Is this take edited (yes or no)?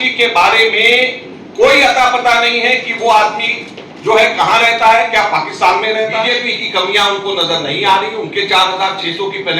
yes